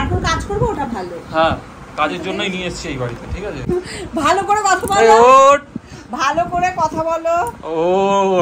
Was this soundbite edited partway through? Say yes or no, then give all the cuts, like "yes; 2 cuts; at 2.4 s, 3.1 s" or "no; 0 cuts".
yes; 1 cut; at 3.7 s